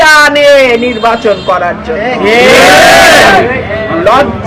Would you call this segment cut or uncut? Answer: uncut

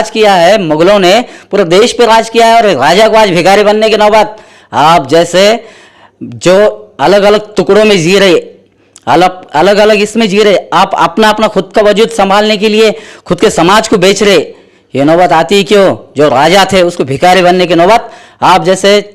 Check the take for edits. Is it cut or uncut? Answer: uncut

